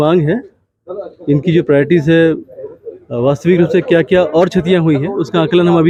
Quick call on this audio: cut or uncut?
uncut